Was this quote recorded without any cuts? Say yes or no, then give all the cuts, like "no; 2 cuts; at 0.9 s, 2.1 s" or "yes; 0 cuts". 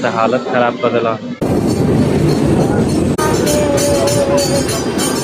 no; 2 cuts; at 1.4 s, 3.2 s